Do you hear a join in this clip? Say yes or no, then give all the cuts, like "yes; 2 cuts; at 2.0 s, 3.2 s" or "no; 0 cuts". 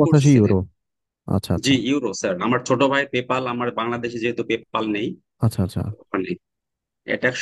no; 0 cuts